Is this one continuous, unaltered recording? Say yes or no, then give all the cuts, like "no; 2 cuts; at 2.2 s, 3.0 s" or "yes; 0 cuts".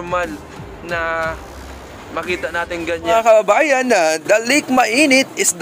no; 1 cut; at 3.1 s